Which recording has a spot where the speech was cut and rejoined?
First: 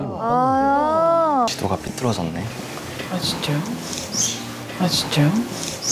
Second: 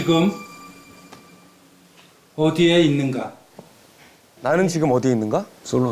first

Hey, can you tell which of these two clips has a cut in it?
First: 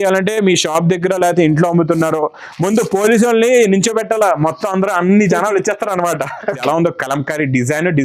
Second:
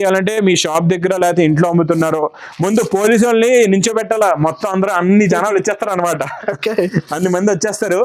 first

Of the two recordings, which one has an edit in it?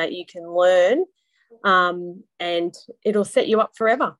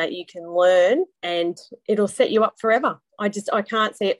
second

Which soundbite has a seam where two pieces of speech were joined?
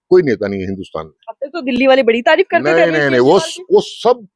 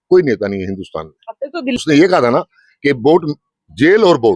second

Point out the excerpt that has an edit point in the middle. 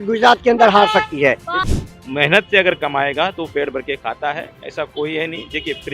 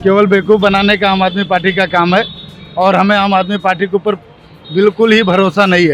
first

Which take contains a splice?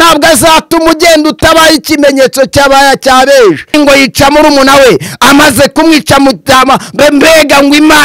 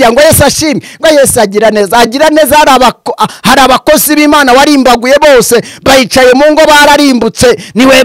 first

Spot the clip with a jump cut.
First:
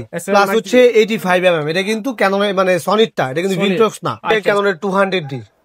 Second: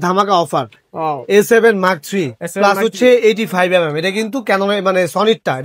first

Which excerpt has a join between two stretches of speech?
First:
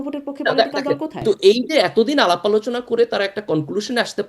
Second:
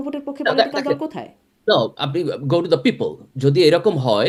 first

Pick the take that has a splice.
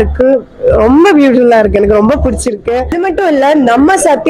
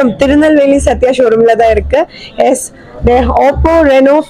first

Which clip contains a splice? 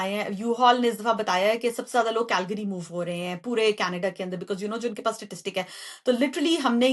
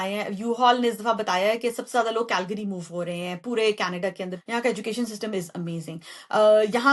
second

